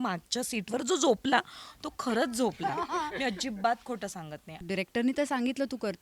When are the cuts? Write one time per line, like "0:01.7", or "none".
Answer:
0:04.6